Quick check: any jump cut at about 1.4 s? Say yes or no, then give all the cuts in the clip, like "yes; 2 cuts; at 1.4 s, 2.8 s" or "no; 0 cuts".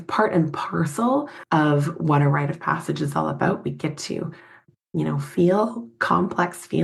yes; 2 cuts; at 1.4 s, 4.6 s